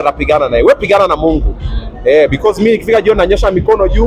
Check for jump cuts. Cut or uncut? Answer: uncut